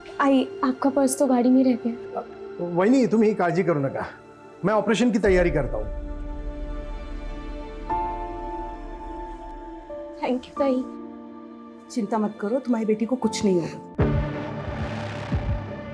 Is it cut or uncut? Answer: cut